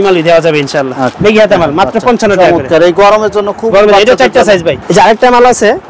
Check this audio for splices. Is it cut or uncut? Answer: cut